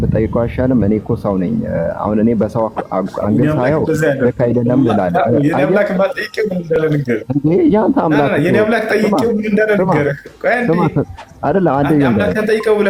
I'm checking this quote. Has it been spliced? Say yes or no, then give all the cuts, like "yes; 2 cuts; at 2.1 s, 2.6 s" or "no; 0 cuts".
no; 0 cuts